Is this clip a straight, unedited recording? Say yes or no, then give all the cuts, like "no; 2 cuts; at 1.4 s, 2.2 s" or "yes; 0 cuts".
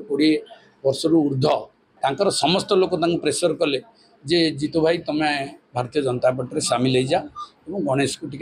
no; 1 cut; at 1.8 s